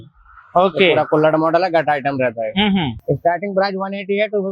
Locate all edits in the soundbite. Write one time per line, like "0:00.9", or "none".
0:03.0

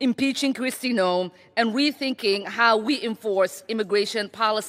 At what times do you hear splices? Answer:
none

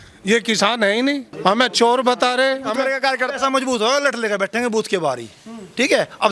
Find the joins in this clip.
0:01.3
0:02.9

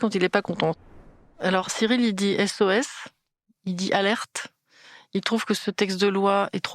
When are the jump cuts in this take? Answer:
0:00.9

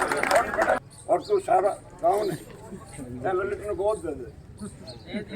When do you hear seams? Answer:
0:00.9

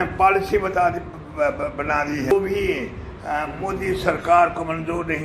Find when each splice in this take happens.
0:02.3

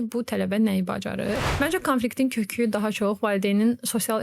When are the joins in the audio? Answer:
0:01.5

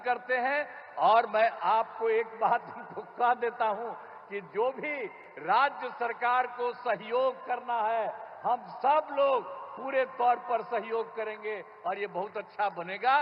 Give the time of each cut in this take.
none

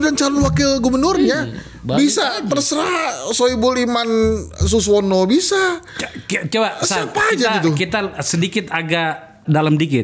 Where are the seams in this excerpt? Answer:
none

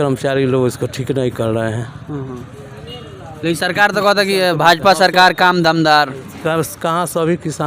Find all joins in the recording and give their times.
none

